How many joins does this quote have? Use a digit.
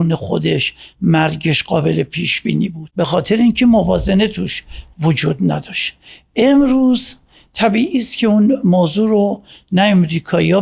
1